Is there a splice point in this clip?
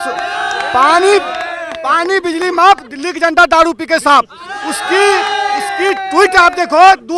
no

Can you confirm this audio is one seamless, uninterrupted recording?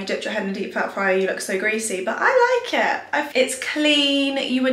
yes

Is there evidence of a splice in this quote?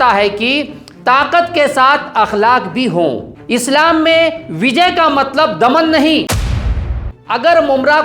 yes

